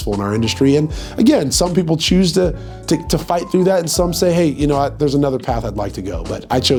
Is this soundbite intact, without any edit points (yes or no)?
yes